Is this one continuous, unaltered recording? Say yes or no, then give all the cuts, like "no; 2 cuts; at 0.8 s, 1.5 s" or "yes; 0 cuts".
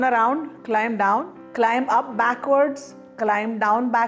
no; 1 cut; at 1.4 s